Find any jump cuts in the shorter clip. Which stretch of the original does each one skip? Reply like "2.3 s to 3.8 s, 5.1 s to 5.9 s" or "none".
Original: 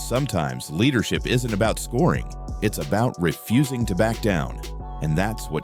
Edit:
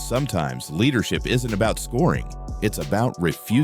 none